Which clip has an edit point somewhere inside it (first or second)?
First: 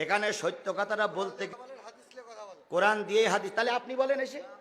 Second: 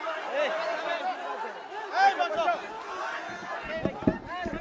first